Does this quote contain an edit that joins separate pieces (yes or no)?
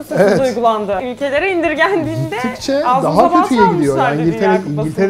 yes